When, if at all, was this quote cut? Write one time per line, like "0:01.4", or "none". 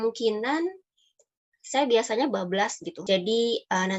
0:02.9